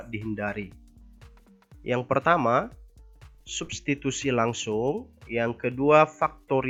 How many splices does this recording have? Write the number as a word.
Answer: zero